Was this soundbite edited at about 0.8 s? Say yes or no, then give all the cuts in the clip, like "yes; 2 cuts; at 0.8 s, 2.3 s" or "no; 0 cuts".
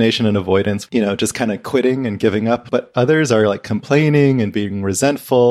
yes; 2 cuts; at 0.8 s, 2.6 s